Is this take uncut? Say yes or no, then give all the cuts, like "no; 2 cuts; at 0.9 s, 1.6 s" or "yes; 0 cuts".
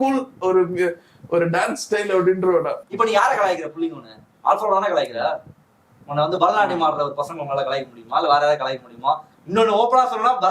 no; 1 cut; at 2.8 s